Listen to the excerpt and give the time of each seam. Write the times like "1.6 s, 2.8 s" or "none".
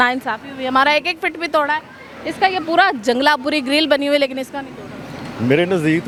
none